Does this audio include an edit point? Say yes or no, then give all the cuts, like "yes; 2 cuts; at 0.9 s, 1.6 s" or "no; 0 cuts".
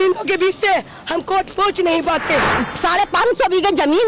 yes; 1 cut; at 2.6 s